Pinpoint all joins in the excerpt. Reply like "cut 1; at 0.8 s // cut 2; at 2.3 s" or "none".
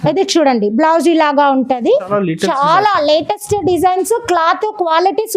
cut 1; at 2.1 s